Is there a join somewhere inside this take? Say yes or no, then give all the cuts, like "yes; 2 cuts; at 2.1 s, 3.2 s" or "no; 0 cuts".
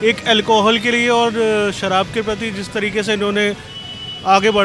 no; 0 cuts